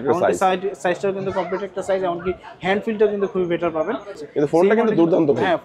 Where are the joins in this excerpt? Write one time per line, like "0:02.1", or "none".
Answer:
0:04.2